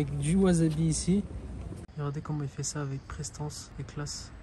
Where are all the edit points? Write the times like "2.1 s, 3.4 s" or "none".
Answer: 1.9 s